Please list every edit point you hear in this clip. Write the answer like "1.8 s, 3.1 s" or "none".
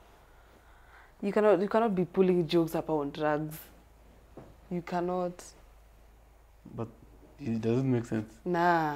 none